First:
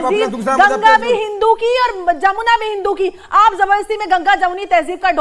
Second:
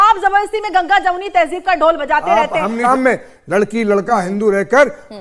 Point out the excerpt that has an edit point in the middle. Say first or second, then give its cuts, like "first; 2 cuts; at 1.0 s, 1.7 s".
second; 1 cut; at 2.8 s